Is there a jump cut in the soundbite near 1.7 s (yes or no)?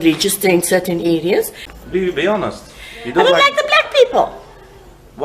yes